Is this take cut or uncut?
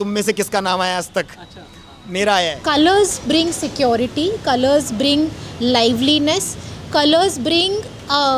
cut